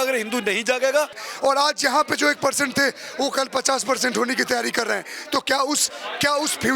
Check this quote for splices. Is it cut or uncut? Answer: cut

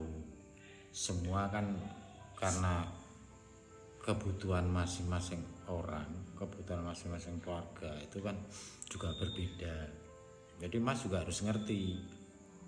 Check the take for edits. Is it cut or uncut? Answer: cut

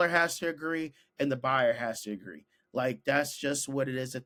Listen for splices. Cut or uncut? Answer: uncut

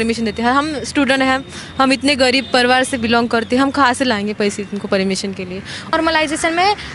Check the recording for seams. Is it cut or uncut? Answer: cut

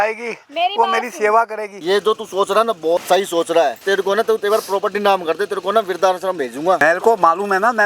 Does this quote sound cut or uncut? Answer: cut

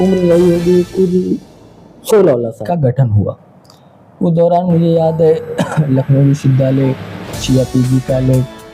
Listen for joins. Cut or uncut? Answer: cut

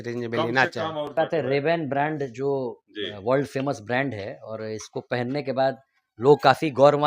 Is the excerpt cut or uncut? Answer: cut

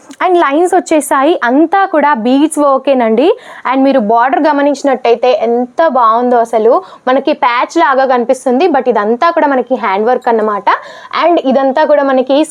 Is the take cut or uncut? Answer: uncut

